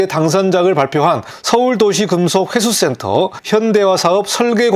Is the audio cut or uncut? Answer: cut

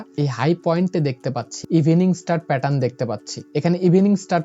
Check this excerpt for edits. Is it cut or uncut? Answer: cut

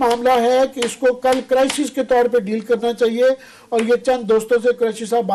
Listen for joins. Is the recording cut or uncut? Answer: uncut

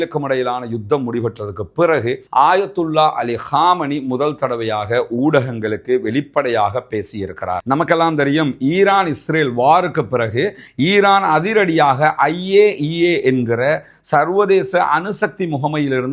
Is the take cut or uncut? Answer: uncut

